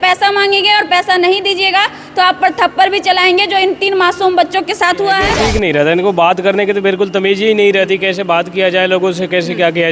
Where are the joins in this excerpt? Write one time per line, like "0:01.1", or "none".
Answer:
0:05.3